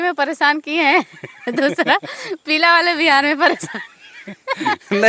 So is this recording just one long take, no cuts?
yes; 0 cuts

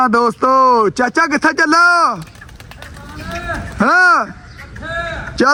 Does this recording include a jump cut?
no; 0 cuts

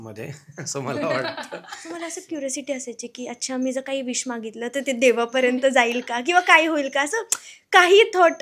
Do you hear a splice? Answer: yes; 1 cut; at 2.0 s

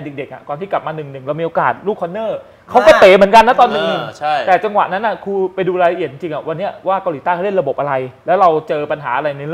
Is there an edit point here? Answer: no; 0 cuts

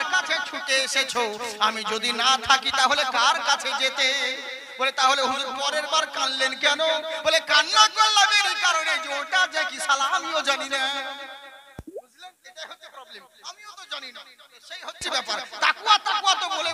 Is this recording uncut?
yes; 0 cuts

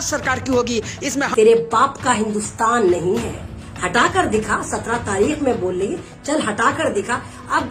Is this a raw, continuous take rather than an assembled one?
no; 1 cut; at 1.3 s

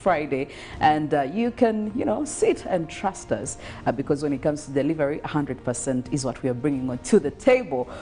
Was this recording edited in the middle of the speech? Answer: yes; 1 cut; at 3.6 s

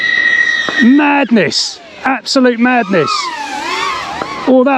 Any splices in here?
no; 0 cuts

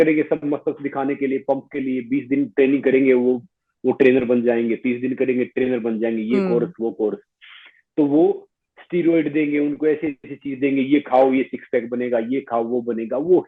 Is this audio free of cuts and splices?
yes; 0 cuts

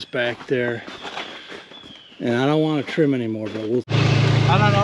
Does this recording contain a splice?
yes; 1 cut; at 3.9 s

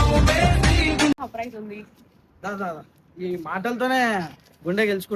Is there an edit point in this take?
no; 0 cuts

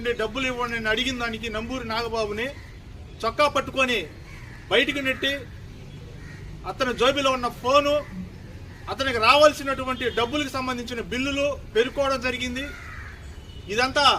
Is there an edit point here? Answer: yes; 1 cut; at 11.5 s

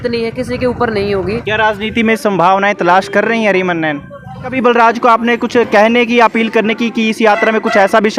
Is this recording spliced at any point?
yes; 2 cuts; at 1.4 s, 4.6 s

